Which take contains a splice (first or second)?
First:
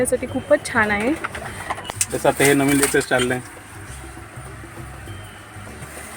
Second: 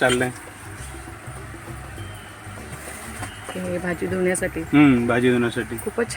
first